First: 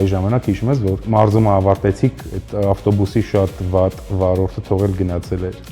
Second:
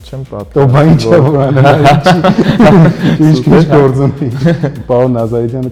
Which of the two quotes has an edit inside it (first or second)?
first